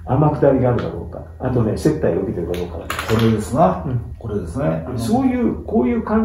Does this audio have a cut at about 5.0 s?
yes; 1 cut; at 5.0 s

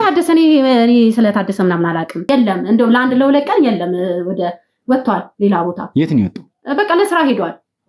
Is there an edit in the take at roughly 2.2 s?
yes; 1 cut; at 2.2 s

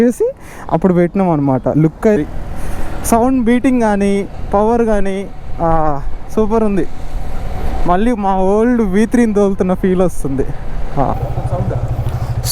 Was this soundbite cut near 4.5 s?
no; 2 cuts; at 2.2 s, 11.1 s

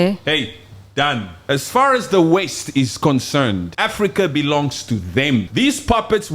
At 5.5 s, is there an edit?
yes; 3 cuts; at 1.4 s, 3.7 s, 5.5 s

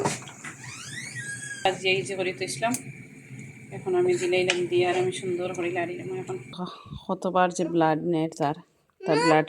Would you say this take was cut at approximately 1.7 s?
yes; 2 cuts; at 1.7 s, 6.7 s

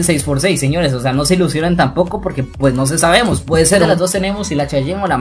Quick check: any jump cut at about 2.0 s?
no; 1 cut; at 3.9 s

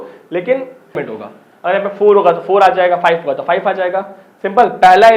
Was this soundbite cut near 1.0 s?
yes; 1 cut; at 1.0 s

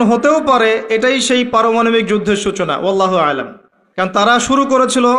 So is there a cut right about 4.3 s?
yes; 1 cut; at 4.3 s

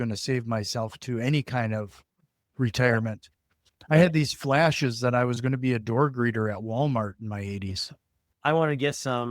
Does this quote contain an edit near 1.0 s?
no; 1 cut; at 8.3 s

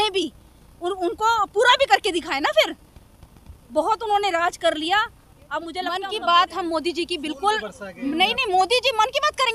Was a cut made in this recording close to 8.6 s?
no; 1 cut; at 5.8 s

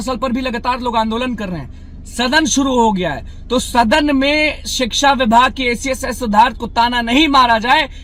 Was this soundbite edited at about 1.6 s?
no; 0 cuts

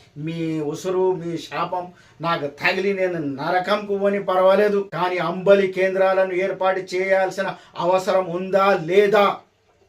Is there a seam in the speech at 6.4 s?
no; 1 cut; at 4.9 s

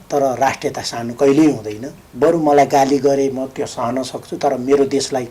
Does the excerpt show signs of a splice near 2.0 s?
yes; 1 cut; at 2.0 s

